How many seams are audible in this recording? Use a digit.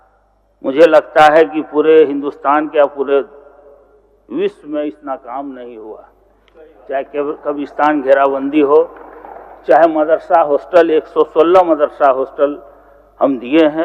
0